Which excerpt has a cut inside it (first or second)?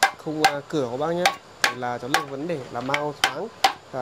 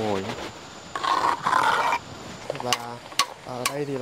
second